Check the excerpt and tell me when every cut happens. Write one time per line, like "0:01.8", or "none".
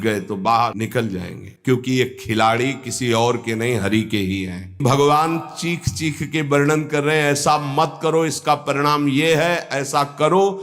0:01.3
0:04.8

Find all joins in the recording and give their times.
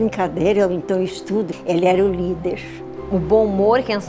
0:01.5
0:03.3

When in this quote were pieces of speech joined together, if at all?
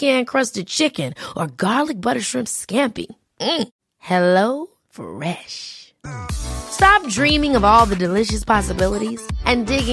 none

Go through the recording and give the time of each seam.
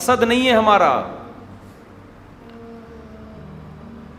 none

